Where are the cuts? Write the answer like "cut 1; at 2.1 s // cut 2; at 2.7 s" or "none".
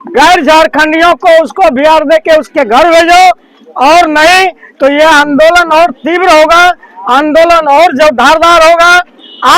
none